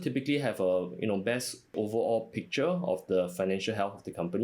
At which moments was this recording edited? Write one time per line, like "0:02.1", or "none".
0:01.7